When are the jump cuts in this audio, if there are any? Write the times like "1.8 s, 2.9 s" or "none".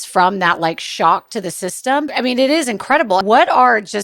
2.1 s, 3.2 s

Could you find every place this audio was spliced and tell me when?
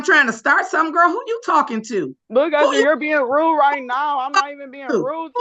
2.2 s

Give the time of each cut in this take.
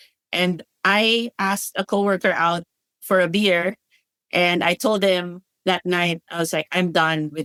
none

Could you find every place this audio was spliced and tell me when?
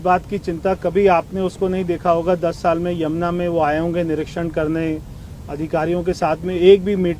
none

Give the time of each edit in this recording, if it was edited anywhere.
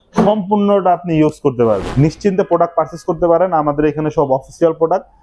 1.9 s

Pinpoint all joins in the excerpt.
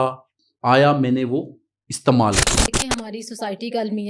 2.8 s

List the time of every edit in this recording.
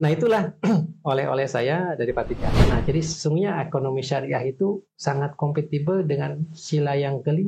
2.6 s

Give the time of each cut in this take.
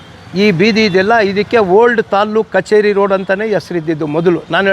none

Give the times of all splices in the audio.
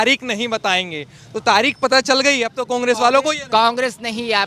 none

